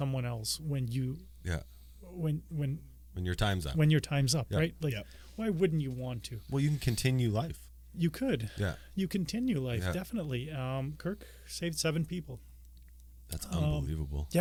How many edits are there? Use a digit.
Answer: 0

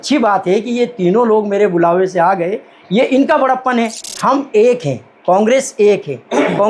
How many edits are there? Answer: 1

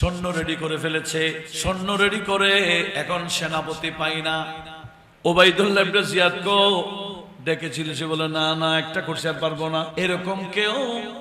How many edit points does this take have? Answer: 3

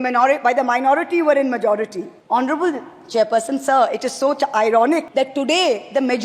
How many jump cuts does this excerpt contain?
2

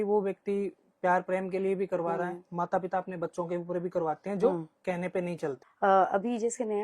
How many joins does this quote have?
1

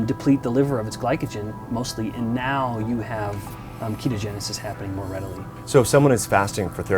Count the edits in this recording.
1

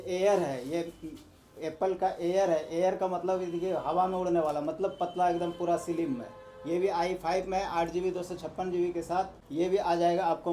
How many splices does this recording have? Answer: 1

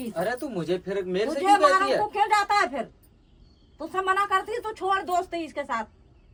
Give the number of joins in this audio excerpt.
0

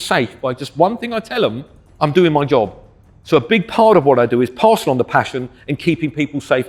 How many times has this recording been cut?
0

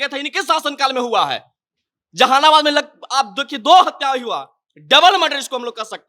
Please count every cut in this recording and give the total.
0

